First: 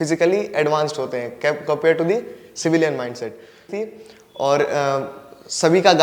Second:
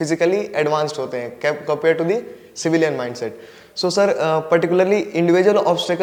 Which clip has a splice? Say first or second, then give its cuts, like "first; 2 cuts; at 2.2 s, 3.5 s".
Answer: first; 1 cut; at 3.7 s